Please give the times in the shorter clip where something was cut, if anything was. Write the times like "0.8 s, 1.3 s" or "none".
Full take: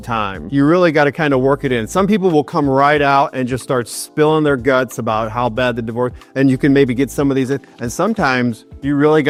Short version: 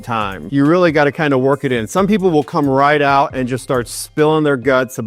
none